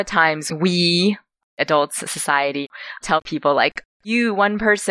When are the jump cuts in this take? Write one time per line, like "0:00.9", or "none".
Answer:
0:01.6
0:02.7

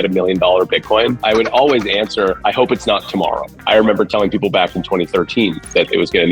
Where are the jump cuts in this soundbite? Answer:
0:01.4
0:03.5

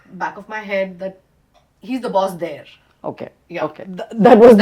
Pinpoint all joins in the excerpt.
none

